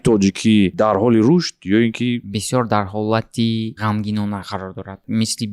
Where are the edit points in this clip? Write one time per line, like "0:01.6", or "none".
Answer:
0:02.3